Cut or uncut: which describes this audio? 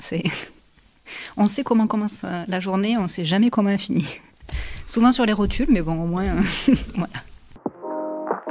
cut